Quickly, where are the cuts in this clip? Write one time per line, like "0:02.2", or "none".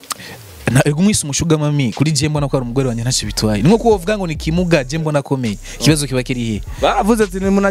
none

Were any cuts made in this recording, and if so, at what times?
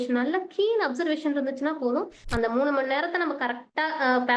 0:02.2

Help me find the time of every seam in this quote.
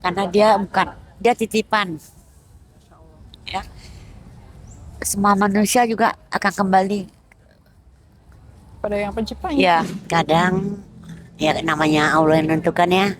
0:10.1

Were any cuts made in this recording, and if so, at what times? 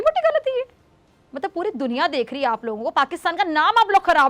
none

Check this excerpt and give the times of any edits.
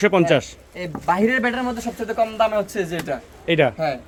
none

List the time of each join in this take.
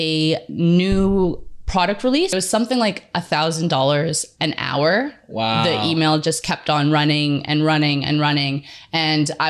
0:02.3

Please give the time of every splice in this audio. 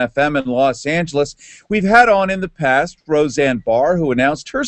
none

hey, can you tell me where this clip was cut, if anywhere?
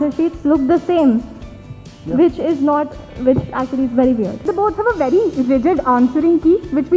0:04.5

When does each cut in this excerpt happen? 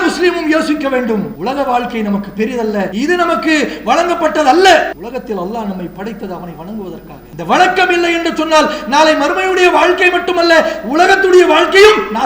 0:01.3
0:02.9
0:05.0
0:07.2

